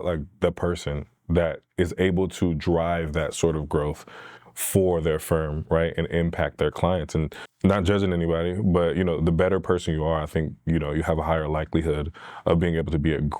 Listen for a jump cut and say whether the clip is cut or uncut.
cut